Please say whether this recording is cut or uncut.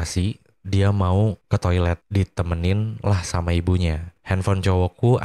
cut